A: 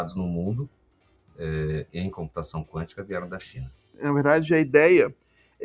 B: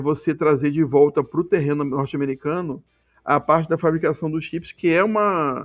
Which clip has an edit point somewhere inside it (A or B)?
A